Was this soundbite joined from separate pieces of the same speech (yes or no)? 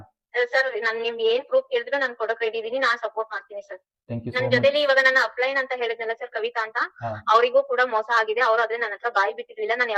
no